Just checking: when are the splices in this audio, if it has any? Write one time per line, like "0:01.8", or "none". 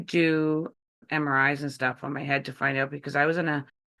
0:00.9